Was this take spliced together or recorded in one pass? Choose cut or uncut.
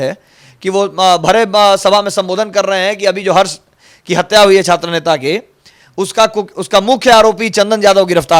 uncut